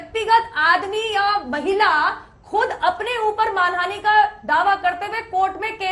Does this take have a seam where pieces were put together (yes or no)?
no